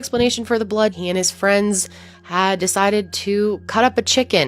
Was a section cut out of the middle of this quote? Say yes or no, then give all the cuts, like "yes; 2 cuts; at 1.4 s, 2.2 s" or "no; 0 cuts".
yes; 1 cut; at 0.9 s